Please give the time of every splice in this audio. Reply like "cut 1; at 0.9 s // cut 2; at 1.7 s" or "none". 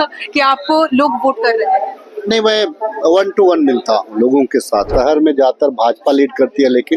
cut 1; at 4.9 s